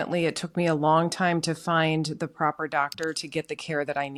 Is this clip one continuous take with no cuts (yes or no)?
yes